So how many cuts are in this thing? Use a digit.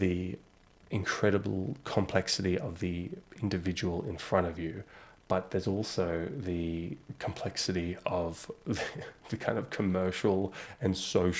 1